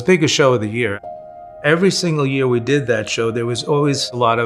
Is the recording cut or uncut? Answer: cut